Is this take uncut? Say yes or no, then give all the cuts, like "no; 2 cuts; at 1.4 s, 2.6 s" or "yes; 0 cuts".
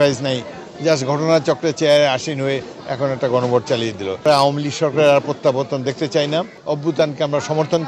no; 2 cuts; at 4.2 s, 6.8 s